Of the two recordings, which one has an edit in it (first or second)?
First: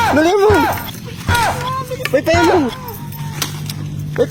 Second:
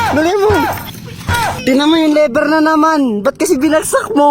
second